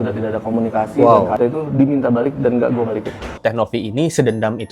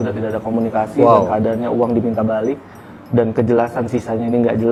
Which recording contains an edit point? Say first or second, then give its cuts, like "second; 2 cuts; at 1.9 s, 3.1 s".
first; 2 cuts; at 1.4 s, 3.4 s